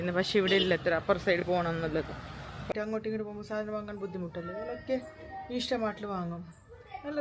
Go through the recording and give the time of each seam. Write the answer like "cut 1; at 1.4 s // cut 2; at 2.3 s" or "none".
cut 1; at 2.7 s

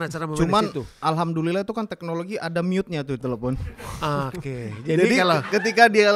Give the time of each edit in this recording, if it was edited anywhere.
none

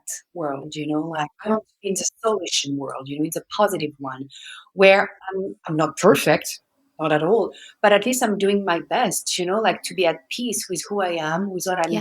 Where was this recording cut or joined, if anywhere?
none

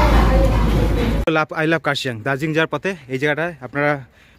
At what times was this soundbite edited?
cut 1; at 1.2 s

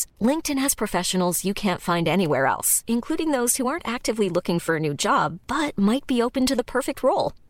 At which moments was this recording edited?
none

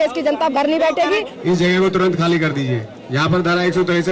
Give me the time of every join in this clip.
cut 1; at 1.3 s

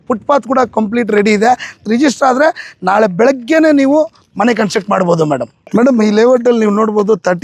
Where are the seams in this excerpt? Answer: cut 1; at 1.8 s // cut 2; at 5.5 s

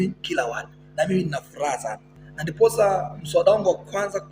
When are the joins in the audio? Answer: cut 1; at 2.5 s

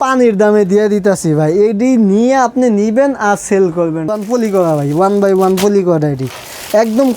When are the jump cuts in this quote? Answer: cut 1; at 4.1 s

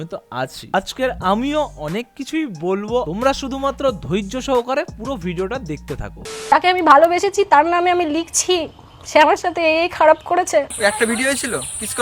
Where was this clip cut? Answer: cut 1; at 3.1 s // cut 2; at 6.5 s // cut 3; at 10.8 s

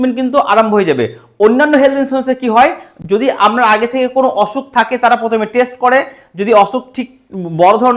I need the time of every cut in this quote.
none

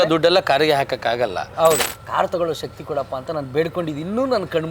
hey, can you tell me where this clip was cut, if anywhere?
cut 1; at 1.9 s

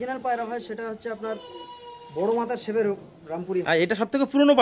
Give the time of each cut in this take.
cut 1; at 3.6 s

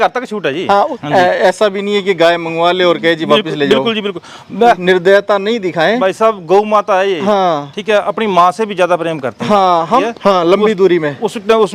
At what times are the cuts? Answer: cut 1; at 1.0 s // cut 2; at 4.8 s // cut 3; at 10.1 s

